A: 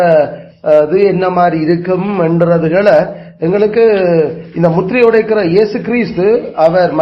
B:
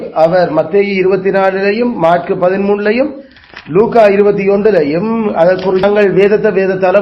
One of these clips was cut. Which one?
B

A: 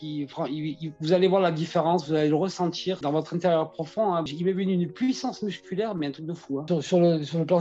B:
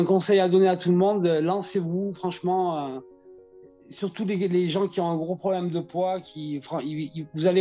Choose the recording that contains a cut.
A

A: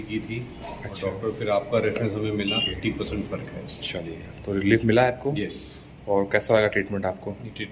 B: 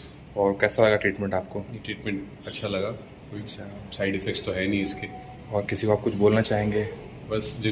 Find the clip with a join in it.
A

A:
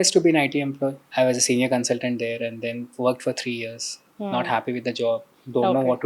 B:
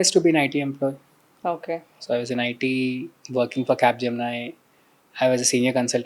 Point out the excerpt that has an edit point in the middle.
A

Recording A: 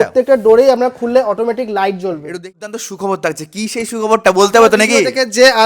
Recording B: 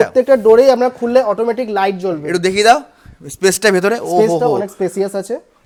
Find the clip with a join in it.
A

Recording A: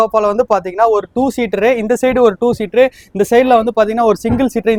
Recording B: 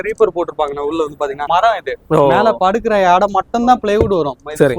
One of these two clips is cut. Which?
B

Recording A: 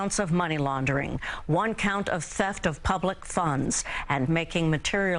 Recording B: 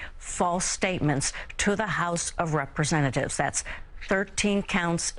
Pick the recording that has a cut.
A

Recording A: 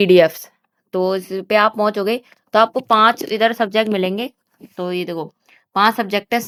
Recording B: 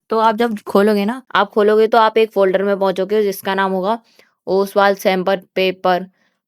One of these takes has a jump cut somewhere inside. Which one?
B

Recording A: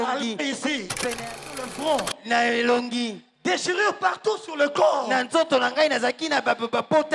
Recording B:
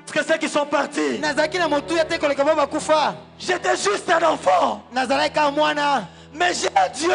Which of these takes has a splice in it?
A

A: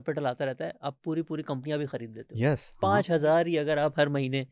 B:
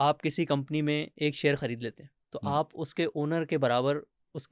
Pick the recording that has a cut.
A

